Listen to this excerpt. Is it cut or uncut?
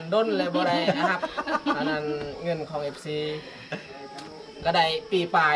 uncut